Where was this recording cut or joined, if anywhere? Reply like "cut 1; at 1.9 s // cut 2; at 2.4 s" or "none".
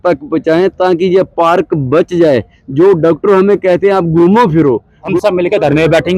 cut 1; at 5.0 s